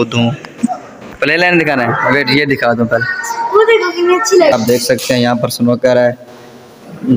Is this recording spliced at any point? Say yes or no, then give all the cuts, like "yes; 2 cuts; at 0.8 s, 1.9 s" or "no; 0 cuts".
yes; 1 cut; at 4.5 s